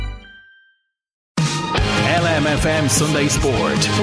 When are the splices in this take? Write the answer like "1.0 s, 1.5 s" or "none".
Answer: 1.3 s